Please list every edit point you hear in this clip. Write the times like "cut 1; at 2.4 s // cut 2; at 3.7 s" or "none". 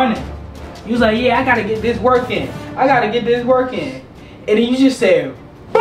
none